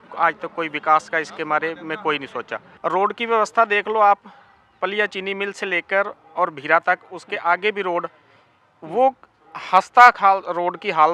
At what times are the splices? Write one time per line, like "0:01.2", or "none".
0:02.7

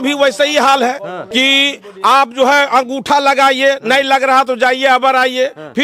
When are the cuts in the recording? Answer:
0:01.2

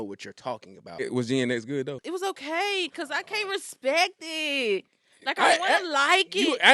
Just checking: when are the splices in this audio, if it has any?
0:01.1
0:02.0

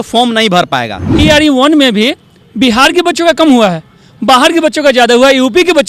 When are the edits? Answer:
0:01.0

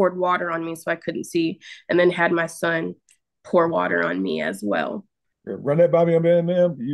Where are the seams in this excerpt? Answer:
0:05.2

